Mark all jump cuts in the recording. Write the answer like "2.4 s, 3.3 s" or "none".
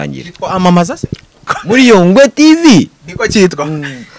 1.6 s